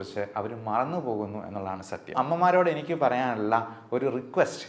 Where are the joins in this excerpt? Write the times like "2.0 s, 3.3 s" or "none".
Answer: 2.1 s